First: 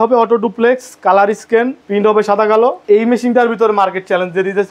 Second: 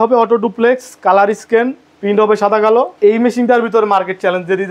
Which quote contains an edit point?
first; 1 cut; at 1.8 s

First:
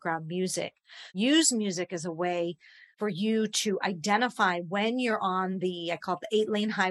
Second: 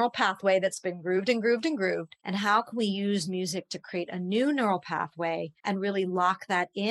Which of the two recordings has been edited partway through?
second; 2 cuts; at 2.1 s, 5.5 s

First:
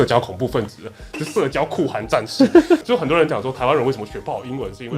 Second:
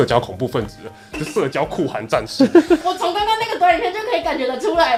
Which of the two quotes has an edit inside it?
first; 1 cut; at 2.8 s

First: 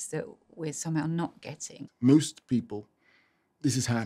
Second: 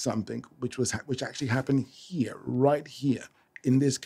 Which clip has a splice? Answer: first; 1 cut; at 1.8 s

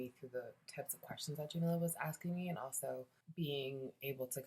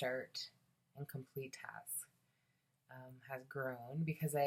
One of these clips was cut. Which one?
first; 1 cut; at 3.2 s

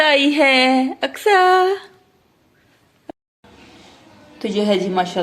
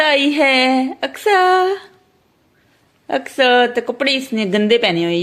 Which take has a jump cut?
first; 1 cut; at 3.0 s

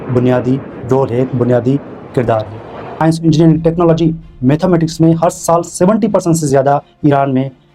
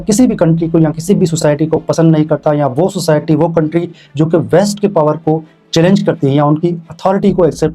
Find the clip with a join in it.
first; 1 cut; at 2.9 s

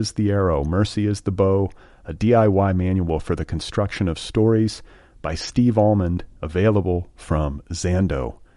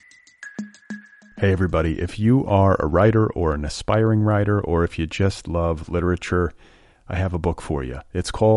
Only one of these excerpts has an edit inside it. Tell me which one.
second; 1 cut; at 0.9 s

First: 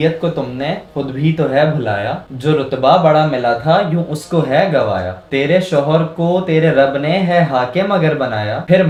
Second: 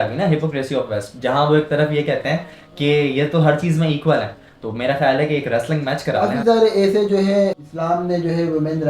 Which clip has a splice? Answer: second; 2 cuts; at 6.2 s, 7.6 s

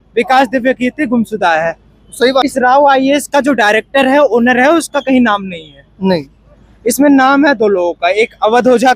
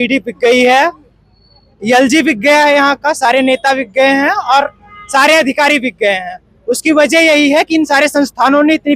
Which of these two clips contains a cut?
first; 1 cut; at 2.4 s

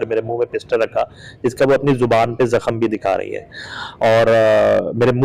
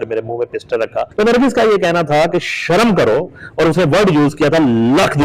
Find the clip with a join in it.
second; 1 cut; at 1.0 s

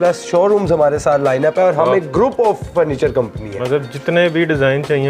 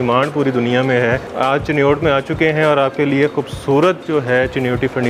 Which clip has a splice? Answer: second; 1 cut; at 1.3 s

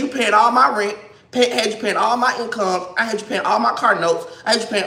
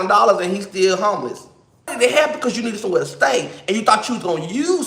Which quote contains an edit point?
second; 1 cut; at 1.9 s

